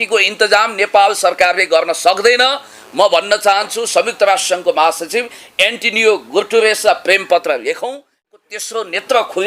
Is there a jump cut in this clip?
yes; 1 cut; at 8.2 s

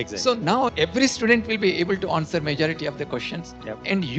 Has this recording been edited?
yes; 1 cut; at 1.4 s

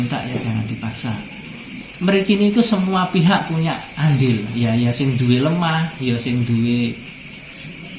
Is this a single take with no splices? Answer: no; 1 cut; at 1.7 s

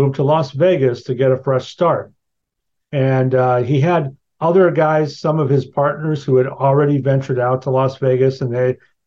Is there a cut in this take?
no; 0 cuts

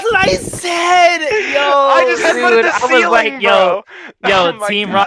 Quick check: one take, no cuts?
yes; 0 cuts

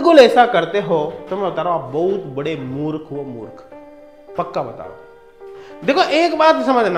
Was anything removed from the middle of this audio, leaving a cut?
no; 0 cuts

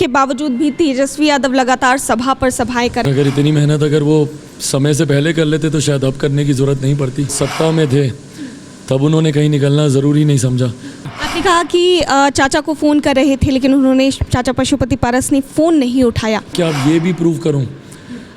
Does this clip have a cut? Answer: yes; 4 cuts; at 3.0 s, 7.3 s, 11.0 s, 16.5 s

